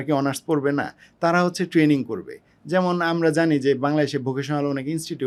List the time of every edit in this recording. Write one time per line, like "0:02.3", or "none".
none

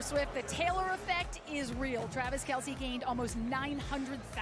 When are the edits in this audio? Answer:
none

